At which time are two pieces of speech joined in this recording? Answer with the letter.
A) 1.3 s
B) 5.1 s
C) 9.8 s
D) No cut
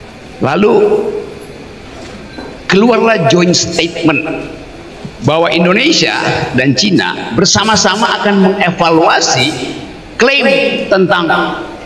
D